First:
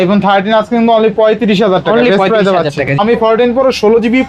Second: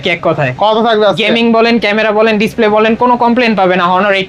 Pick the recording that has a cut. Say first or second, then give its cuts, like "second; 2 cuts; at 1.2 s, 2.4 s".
first; 1 cut; at 3.0 s